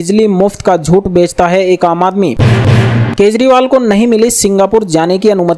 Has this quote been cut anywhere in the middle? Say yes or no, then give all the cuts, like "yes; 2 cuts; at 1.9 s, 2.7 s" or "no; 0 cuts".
yes; 1 cut; at 2.4 s